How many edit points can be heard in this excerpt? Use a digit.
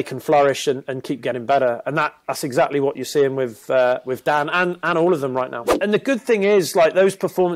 1